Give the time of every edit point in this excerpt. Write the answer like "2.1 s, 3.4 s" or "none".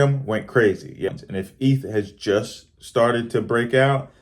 1.2 s